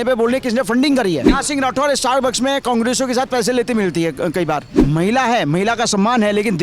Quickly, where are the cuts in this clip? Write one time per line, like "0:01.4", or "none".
0:01.3
0:04.7